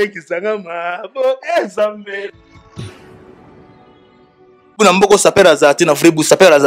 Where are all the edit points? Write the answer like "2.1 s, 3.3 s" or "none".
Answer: 4.8 s